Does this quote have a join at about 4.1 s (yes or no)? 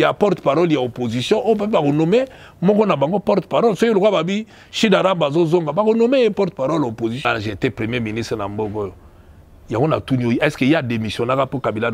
no